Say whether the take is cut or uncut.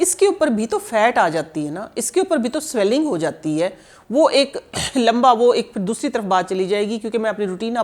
uncut